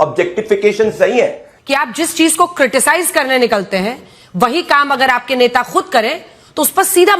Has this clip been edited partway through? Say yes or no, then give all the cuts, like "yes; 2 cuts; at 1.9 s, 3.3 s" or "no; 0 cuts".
yes; 1 cut; at 1.5 s